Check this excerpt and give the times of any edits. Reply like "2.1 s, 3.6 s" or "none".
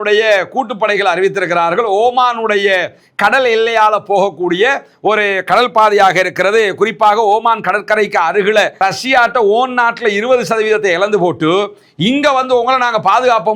8.7 s